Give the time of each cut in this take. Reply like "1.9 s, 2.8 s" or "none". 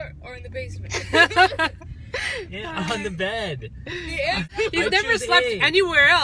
4.5 s